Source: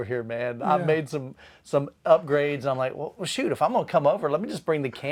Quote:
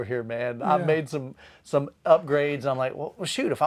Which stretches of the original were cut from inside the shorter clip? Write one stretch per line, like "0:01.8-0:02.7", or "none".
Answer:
none